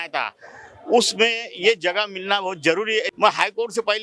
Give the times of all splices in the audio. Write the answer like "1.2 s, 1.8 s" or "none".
3.1 s